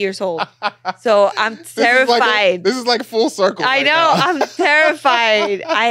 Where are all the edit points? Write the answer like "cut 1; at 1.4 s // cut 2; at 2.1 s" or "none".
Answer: none